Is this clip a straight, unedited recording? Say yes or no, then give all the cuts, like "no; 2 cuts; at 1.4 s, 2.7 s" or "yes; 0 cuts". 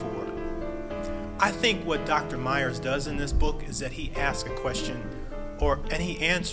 yes; 0 cuts